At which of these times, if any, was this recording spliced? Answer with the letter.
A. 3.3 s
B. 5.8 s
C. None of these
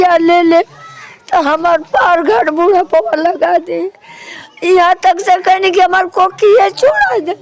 C